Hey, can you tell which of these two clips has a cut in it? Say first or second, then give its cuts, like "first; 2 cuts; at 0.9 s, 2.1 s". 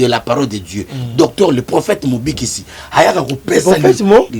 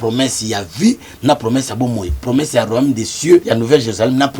second; 1 cut; at 3.5 s